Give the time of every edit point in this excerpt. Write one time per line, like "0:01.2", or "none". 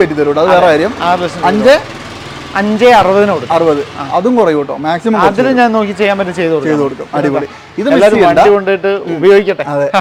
none